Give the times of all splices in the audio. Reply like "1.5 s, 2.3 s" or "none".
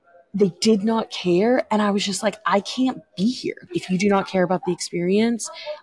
3.6 s